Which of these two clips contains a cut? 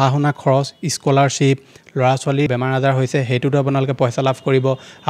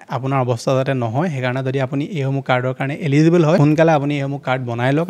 second; 1 cut; at 3.6 s

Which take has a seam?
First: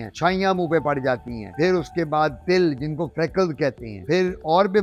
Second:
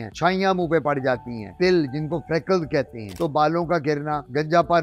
second; 2 cuts; at 1.5 s, 3.1 s

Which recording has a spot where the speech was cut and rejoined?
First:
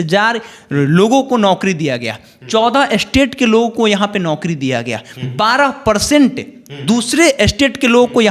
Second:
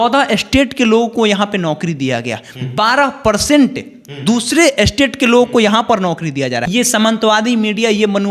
second; 1 cut; at 6.7 s

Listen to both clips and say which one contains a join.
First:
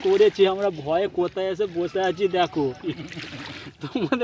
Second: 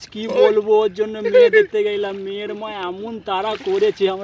first; 1 cut; at 2.8 s

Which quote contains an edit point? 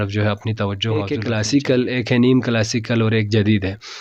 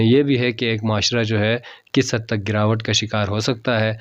first; 1 cut; at 1.1 s

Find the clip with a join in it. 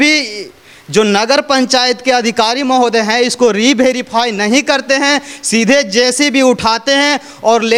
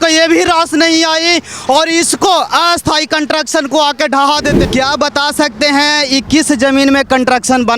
second; 1 cut; at 4.6 s

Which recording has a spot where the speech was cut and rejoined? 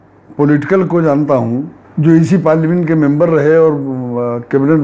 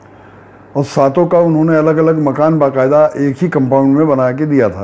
first; 1 cut; at 1.8 s

